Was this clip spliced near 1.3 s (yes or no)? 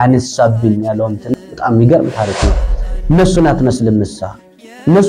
yes